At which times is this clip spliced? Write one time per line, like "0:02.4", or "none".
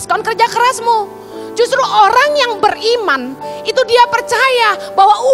none